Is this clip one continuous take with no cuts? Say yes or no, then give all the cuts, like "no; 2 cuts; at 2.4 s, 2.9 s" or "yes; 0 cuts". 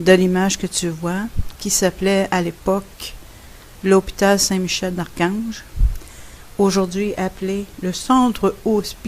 no; 1 cut; at 0.9 s